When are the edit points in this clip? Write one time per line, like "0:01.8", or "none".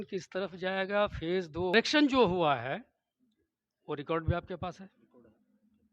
0:01.7